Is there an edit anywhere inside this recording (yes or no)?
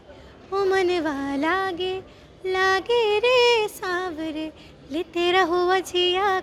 no